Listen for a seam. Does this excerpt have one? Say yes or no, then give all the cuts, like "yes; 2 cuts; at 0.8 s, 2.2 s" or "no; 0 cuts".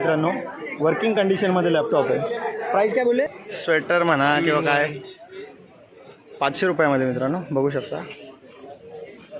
yes; 1 cut; at 3.4 s